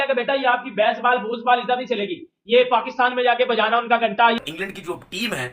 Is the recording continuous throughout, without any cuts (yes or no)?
no